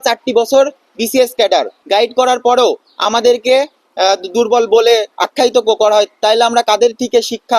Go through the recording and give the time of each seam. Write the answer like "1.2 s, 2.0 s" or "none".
1.8 s